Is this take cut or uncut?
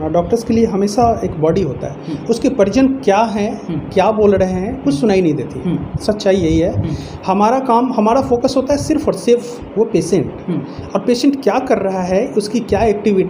uncut